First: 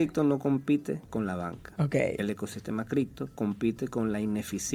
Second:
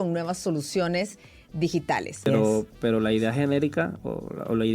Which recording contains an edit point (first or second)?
second